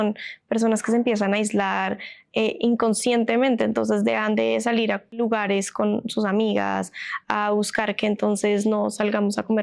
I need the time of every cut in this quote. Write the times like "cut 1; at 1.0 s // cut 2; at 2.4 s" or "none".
cut 1; at 5.1 s